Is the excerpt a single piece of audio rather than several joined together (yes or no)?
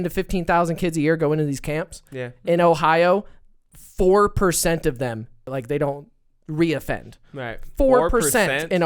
no